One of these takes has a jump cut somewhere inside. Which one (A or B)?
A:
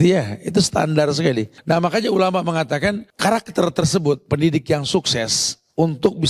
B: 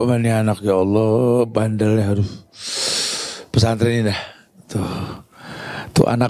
A